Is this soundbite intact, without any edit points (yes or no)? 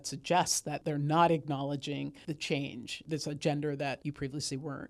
no